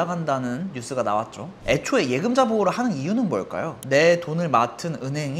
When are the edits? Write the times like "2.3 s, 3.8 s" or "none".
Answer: 1.5 s, 3.7 s

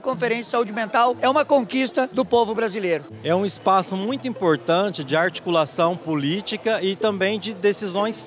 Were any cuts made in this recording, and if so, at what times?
1.2 s, 2.1 s, 3.1 s

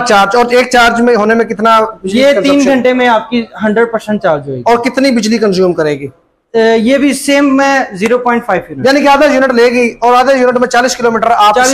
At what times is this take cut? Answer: none

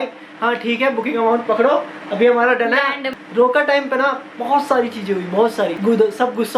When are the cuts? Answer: 3.1 s, 5.8 s

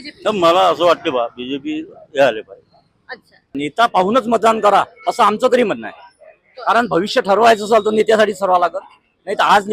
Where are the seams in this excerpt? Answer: 3.3 s

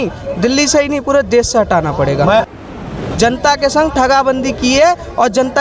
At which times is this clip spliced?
2.9 s

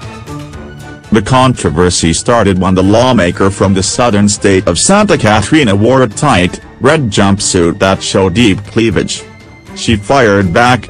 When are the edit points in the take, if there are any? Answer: 1.0 s

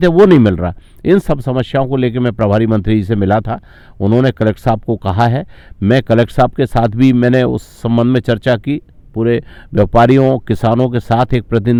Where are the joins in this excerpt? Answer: none

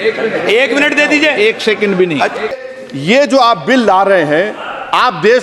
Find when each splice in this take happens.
2.7 s

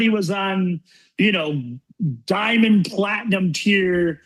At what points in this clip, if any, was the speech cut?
none

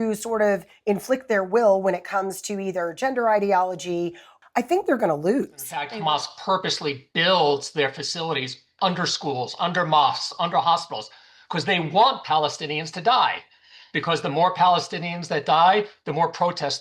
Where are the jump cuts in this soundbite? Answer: 4.3 s, 5.9 s

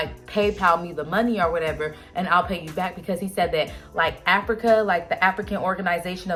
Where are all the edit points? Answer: none

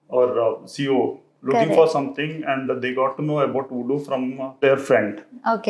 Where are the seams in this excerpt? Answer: 4.6 s

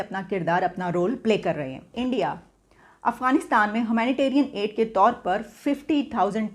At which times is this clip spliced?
1.9 s

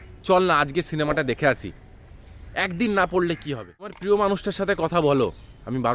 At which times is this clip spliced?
4.0 s

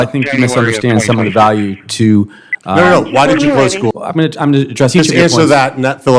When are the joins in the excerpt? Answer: 4.0 s

